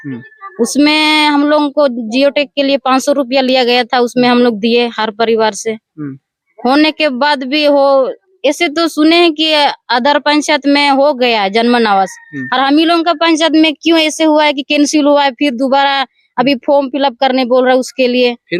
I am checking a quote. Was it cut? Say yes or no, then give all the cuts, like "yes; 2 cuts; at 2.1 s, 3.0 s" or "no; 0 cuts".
no; 0 cuts